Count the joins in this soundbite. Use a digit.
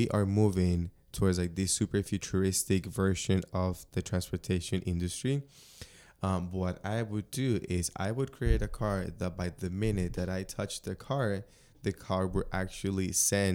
0